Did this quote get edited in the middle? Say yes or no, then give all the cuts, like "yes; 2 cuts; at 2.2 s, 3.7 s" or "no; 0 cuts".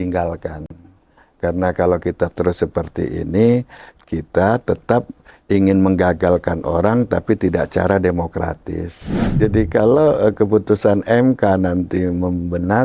yes; 1 cut; at 9.3 s